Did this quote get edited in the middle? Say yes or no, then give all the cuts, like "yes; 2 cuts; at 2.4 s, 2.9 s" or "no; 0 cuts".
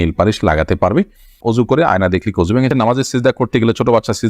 yes; 2 cuts; at 1.4 s, 2.7 s